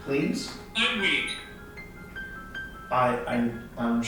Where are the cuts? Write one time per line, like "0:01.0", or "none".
none